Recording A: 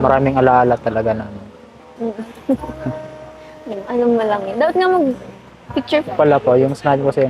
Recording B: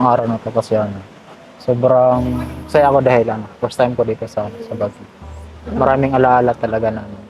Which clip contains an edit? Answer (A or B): A